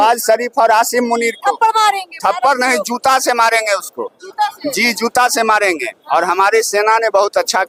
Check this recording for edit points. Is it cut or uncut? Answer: uncut